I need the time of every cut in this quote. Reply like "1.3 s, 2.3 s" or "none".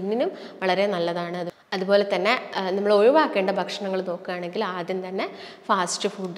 1.5 s